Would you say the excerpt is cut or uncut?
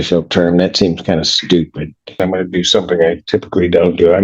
cut